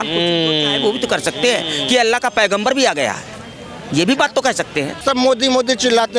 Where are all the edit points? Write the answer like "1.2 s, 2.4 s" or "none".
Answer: 5.0 s